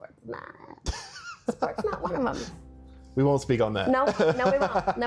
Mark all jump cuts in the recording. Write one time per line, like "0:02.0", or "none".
none